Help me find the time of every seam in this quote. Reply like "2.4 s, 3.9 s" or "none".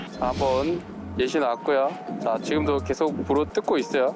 2.1 s